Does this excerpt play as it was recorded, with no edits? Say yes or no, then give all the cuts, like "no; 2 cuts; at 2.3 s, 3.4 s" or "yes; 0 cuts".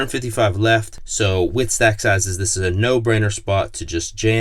no; 1 cut; at 1.0 s